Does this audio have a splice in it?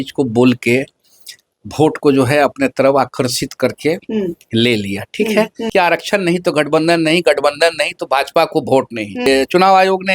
yes; 2 cuts; at 5.6 s, 9.3 s

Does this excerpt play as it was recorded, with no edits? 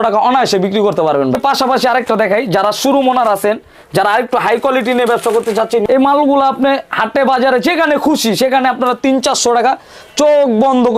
no; 2 cuts; at 1.4 s, 5.8 s

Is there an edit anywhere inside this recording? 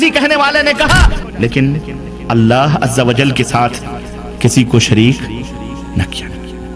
yes; 1 cut; at 1.1 s

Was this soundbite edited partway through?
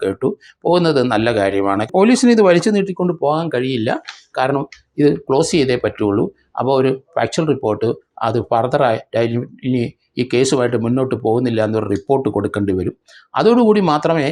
yes; 1 cut; at 1.9 s

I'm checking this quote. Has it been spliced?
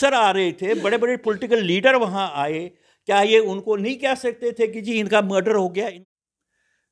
yes; 1 cut; at 5.8 s

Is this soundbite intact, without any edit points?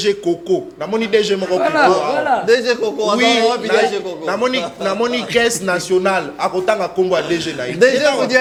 yes; 0 cuts

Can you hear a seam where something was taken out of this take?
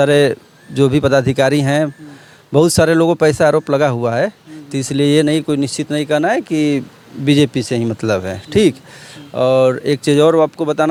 no; 0 cuts

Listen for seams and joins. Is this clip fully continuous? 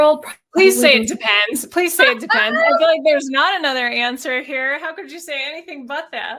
yes; 0 cuts

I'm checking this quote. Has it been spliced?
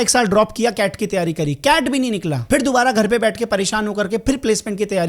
yes; 1 cut; at 2.3 s

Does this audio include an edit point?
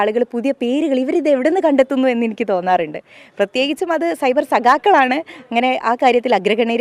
no; 0 cuts

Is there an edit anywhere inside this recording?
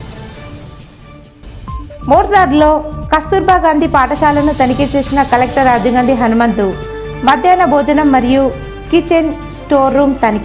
yes; 1 cut; at 1.9 s

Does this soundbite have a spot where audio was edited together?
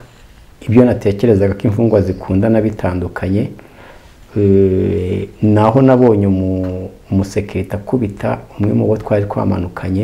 no; 0 cuts

